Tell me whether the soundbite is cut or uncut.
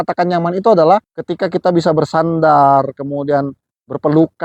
uncut